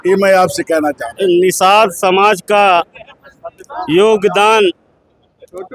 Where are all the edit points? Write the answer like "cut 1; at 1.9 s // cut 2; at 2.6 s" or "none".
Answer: cut 1; at 1.2 s